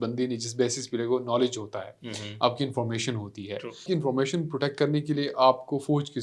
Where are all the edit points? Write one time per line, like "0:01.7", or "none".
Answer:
0:03.9